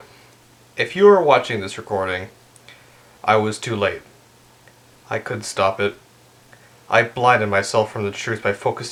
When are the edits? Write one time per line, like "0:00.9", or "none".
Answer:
none